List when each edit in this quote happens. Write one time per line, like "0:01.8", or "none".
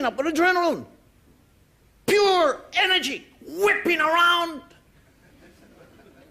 0:05.2